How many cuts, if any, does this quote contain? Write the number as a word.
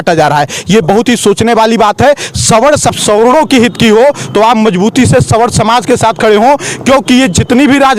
one